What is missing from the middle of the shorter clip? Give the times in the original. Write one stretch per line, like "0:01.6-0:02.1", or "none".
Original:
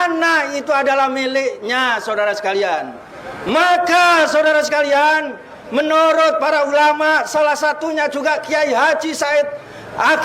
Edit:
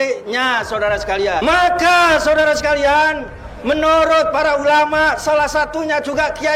0:02.8-0:03.5